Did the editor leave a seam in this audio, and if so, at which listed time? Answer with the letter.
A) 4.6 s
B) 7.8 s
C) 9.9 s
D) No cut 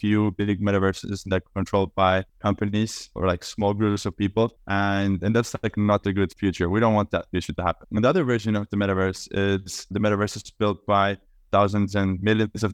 B